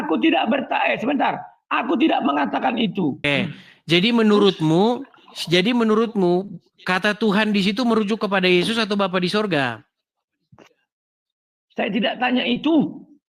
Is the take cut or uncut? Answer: cut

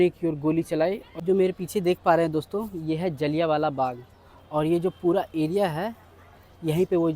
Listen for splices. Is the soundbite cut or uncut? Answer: cut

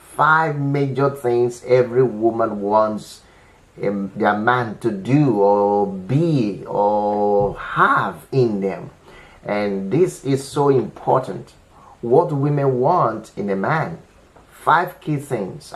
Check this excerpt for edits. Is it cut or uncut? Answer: uncut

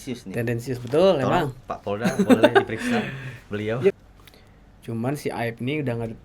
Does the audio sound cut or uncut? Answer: cut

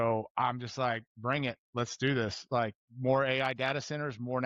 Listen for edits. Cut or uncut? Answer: uncut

